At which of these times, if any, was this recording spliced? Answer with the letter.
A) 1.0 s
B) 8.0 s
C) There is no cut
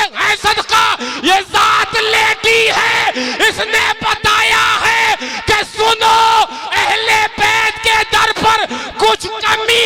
C